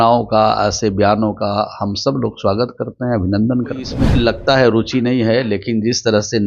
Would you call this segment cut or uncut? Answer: cut